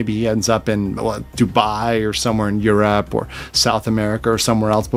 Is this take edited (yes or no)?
no